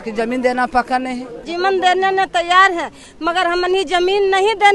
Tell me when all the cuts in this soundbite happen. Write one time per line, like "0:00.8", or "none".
0:01.4